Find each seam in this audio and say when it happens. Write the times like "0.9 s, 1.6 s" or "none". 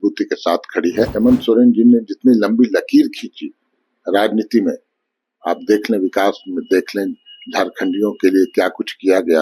1.1 s